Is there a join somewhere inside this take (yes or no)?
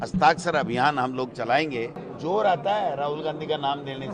yes